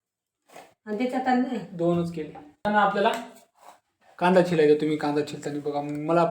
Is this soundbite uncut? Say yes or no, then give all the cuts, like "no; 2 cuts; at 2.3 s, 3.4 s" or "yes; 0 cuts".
no; 1 cut; at 2.7 s